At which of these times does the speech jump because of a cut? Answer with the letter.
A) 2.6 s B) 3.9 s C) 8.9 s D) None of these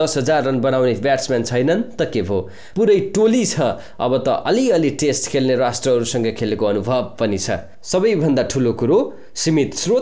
A